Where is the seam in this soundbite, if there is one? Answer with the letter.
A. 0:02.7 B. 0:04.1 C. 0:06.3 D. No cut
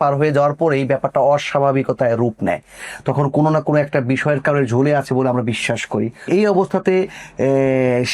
C